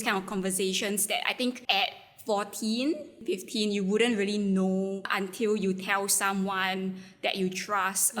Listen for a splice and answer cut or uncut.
cut